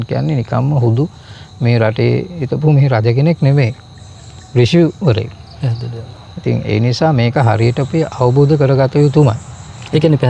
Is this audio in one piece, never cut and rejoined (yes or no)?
yes